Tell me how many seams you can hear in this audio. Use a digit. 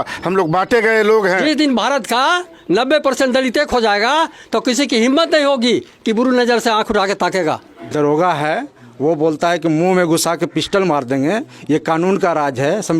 2